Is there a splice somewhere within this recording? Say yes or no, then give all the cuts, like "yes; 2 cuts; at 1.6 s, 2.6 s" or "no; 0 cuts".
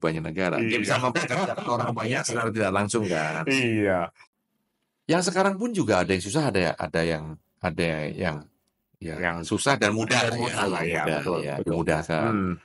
yes; 1 cut; at 4.2 s